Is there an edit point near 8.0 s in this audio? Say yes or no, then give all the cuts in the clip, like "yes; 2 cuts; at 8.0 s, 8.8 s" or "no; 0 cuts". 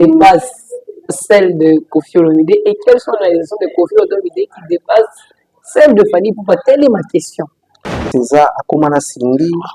yes; 1 cut; at 8.0 s